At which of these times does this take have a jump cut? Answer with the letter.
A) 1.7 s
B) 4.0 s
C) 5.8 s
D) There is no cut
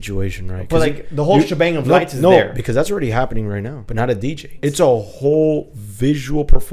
B